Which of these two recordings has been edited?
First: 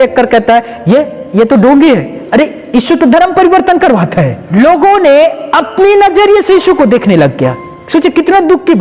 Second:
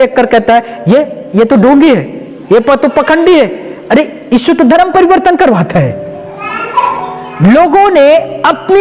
first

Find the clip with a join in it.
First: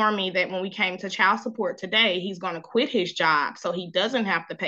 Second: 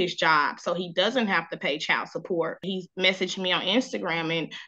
second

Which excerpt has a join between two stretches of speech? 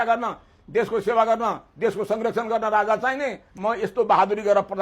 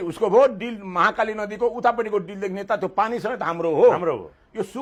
first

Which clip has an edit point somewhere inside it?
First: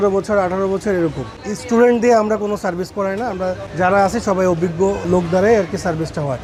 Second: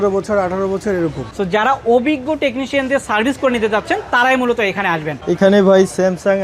second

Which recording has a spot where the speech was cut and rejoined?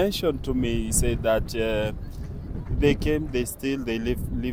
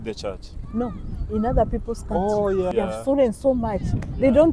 second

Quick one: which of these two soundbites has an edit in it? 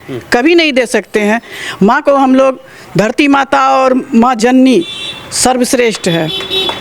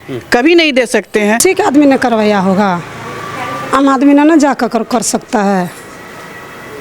second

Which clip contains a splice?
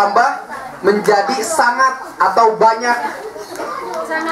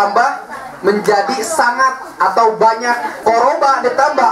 second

